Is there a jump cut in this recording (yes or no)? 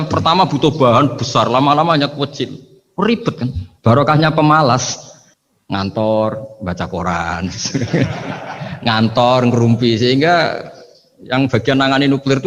no